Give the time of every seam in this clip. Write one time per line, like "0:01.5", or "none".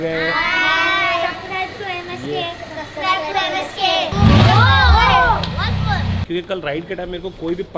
0:04.1
0:06.2